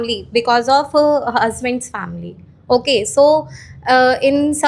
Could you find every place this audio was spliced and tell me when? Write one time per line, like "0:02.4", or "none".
none